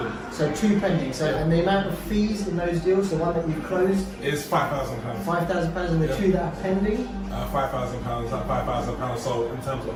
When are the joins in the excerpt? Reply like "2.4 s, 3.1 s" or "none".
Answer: none